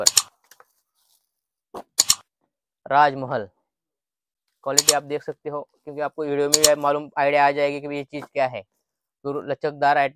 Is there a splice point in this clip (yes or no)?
no